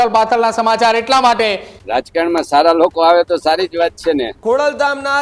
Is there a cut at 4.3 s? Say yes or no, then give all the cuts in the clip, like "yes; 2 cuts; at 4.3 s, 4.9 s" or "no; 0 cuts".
yes; 2 cuts; at 1.7 s, 4.3 s